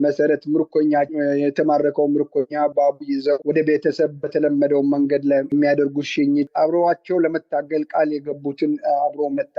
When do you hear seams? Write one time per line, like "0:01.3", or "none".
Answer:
0:05.5
0:06.5